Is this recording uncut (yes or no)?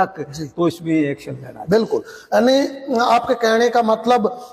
yes